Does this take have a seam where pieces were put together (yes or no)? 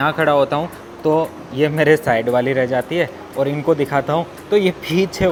no